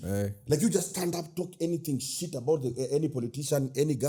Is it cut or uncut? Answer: uncut